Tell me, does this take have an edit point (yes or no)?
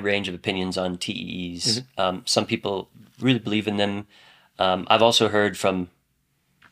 no